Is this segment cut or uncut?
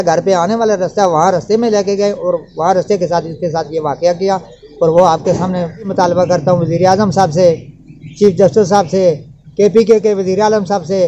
cut